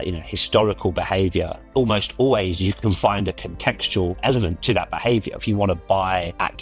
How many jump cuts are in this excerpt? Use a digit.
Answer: 2